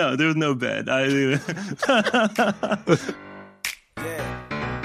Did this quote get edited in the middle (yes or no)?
yes